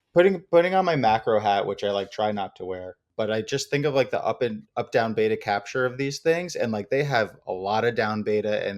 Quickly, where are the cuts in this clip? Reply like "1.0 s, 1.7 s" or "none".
3.0 s